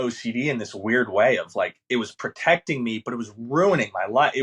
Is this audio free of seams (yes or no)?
yes